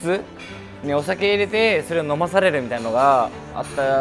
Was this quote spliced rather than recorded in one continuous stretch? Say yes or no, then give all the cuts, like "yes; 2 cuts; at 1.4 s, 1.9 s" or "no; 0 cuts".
no; 0 cuts